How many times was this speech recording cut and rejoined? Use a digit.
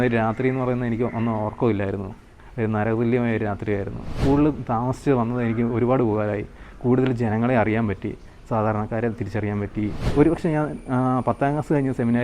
2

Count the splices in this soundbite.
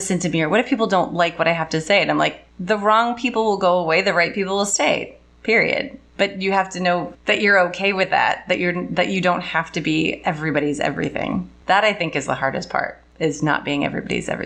4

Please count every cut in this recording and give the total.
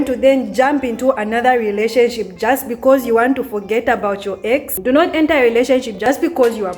2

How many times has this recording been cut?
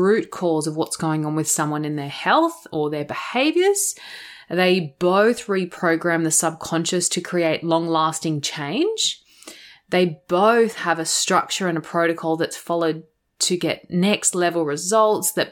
0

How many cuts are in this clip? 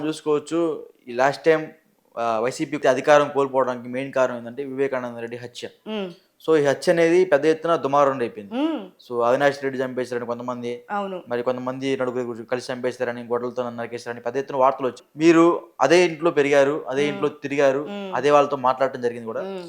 2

